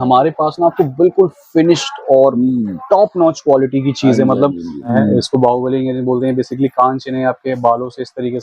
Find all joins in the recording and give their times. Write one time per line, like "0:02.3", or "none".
0:04.9